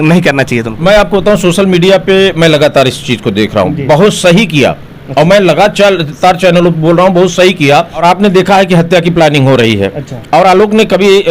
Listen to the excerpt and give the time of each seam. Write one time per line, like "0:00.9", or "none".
0:08.0